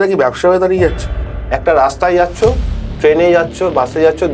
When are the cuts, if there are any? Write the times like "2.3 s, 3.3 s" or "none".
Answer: 1.3 s